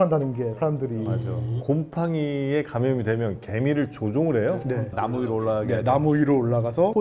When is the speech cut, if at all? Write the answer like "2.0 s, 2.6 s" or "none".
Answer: 1.5 s